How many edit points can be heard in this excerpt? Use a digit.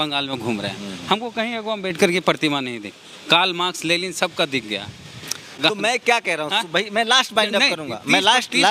0